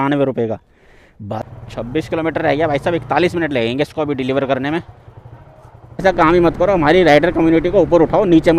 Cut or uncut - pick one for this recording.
cut